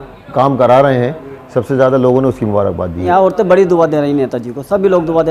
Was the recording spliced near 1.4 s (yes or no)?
no